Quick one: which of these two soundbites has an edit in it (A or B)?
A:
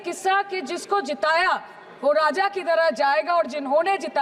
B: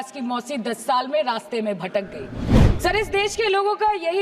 B